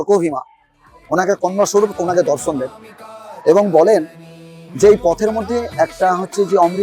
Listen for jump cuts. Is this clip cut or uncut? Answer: uncut